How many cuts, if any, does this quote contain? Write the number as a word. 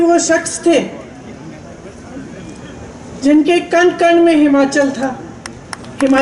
zero